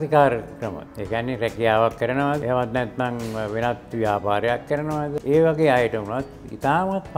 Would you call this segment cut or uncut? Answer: cut